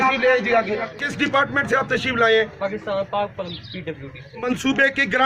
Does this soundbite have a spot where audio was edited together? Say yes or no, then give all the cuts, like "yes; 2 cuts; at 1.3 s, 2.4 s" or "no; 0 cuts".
yes; 2 cuts; at 1.0 s, 4.3 s